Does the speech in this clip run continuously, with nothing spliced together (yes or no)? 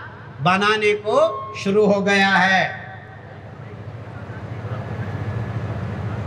yes